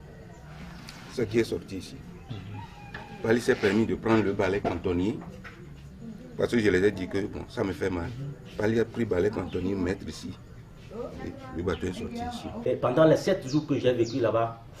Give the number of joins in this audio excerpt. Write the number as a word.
one